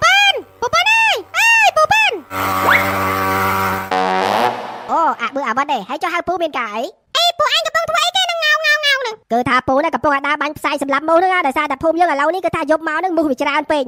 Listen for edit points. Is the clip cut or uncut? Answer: uncut